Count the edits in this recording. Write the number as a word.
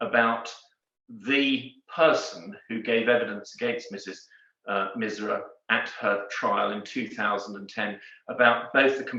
zero